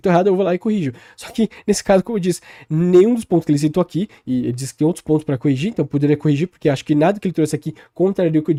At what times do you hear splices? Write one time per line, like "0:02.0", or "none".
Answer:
none